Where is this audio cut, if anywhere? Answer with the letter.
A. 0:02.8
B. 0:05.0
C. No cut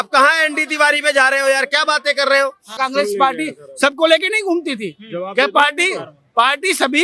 A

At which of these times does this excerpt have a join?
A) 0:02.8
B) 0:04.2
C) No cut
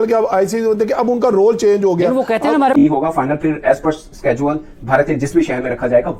A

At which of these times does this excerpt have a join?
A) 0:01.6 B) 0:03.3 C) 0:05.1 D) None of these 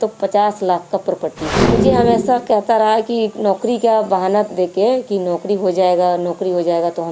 A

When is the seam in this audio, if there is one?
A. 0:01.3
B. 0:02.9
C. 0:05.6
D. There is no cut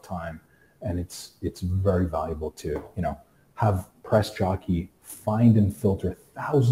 D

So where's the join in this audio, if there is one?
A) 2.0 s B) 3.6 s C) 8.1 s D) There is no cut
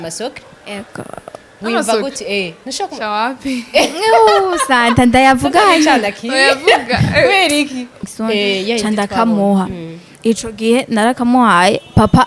C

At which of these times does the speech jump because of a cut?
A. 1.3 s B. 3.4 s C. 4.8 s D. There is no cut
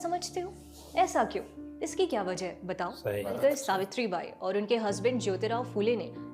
B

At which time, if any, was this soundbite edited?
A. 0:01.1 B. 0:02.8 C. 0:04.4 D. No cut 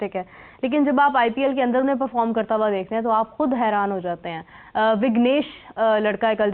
D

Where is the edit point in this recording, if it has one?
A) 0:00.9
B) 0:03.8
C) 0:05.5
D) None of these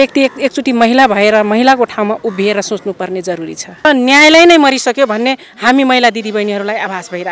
B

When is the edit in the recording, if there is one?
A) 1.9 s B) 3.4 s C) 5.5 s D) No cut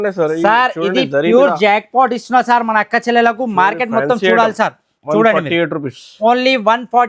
D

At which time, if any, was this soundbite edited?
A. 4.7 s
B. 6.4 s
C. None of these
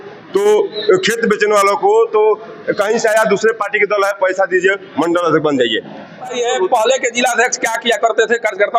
B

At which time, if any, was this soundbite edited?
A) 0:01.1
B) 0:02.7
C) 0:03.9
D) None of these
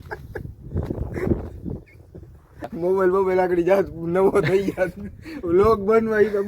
B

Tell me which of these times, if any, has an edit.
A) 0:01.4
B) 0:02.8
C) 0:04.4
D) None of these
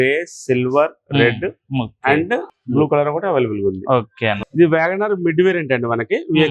C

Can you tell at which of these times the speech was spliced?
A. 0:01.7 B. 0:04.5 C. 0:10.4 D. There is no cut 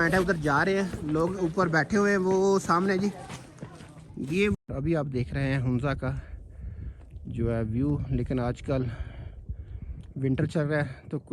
B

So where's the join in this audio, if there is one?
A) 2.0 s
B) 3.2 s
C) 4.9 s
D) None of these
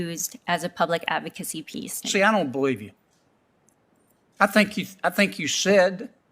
A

